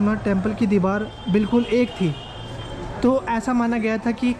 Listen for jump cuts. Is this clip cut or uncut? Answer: uncut